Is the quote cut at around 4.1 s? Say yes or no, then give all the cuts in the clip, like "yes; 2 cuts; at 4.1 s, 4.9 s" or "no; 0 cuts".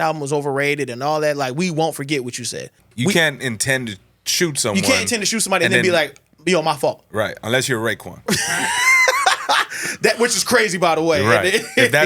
no; 2 cuts; at 2.8 s, 8.3 s